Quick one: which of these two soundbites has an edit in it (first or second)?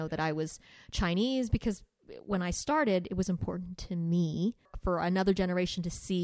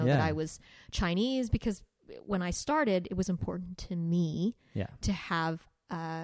first